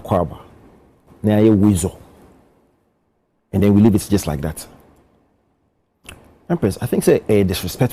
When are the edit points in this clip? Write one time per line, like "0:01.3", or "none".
none